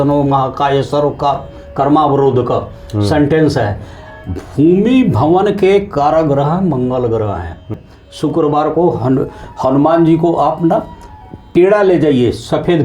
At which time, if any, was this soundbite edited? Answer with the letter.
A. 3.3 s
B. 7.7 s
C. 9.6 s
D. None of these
B